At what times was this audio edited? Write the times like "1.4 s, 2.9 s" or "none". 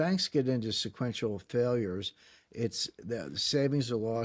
none